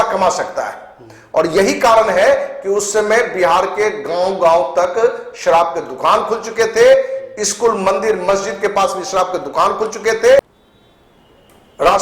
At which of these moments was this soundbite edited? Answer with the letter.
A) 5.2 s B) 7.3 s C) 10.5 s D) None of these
C